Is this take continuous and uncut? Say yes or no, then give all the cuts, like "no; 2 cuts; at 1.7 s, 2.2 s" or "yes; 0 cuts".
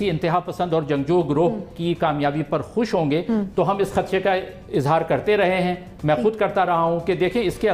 yes; 0 cuts